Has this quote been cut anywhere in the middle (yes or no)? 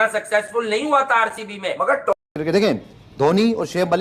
yes